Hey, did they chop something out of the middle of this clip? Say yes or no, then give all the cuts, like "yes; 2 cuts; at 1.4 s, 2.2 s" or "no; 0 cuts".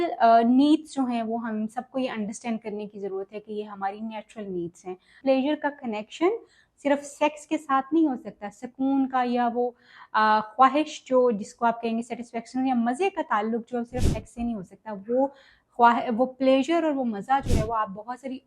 yes; 1 cut; at 5.2 s